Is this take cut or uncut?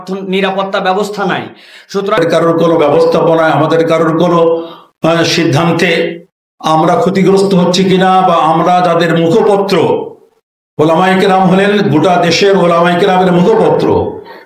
cut